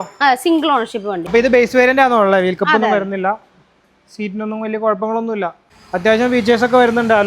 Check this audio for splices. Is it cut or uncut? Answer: cut